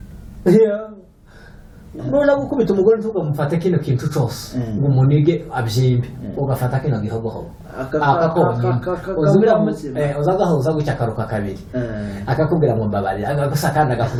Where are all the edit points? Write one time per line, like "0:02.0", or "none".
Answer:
none